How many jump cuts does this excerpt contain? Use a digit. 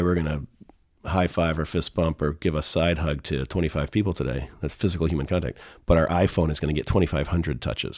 0